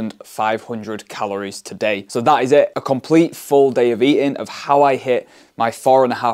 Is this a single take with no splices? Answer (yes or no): yes